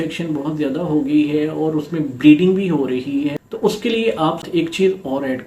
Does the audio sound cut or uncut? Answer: cut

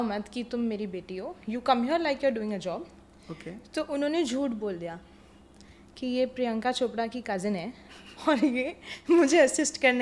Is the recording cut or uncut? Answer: uncut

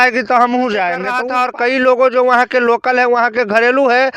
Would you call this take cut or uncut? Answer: cut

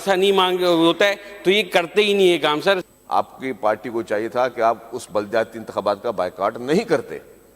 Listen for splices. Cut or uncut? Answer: cut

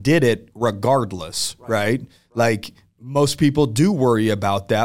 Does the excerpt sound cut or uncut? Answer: uncut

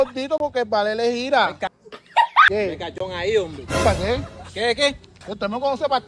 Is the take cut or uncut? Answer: cut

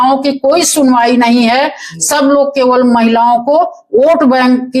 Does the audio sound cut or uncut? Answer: uncut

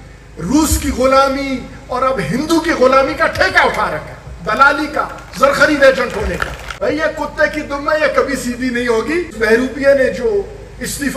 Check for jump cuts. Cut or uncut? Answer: cut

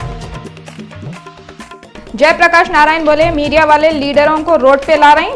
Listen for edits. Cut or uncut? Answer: cut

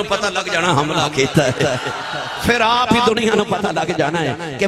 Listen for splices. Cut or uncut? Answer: uncut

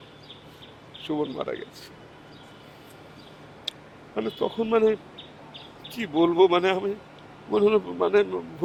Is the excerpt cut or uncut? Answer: uncut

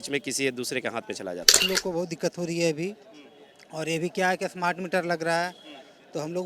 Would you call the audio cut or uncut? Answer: cut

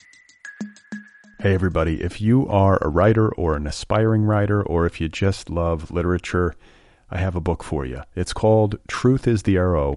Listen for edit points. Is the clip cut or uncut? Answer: cut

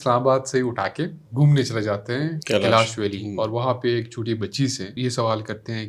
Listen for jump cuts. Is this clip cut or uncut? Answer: cut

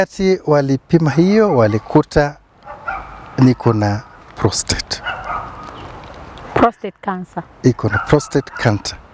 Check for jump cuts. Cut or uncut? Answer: uncut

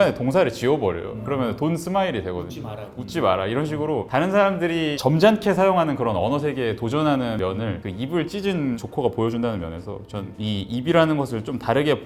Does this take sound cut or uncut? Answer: uncut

